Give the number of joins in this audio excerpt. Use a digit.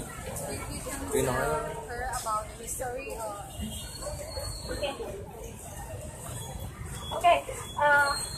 1